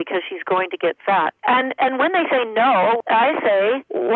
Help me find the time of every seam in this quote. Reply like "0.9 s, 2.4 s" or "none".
3.0 s